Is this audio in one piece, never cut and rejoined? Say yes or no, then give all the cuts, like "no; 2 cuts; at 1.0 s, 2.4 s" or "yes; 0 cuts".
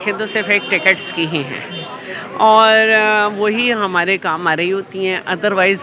yes; 0 cuts